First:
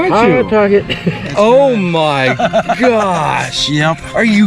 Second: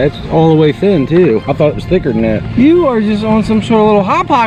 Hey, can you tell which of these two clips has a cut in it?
first; 1 cut; at 1.3 s

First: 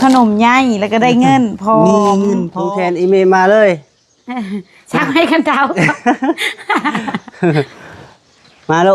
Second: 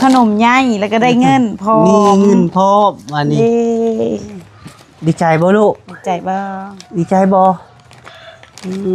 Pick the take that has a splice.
first; 1 cut; at 2.5 s

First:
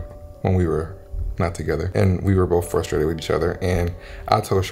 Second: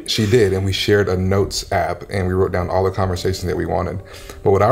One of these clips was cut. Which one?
first; 1 cut; at 1.9 s

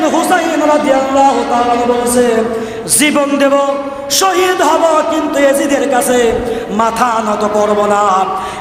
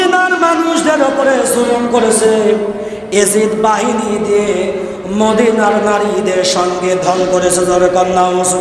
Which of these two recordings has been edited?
second; 1 cut; at 7.2 s

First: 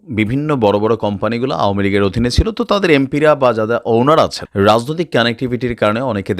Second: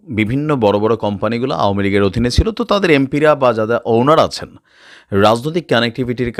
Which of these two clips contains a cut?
first; 1 cut; at 4.4 s

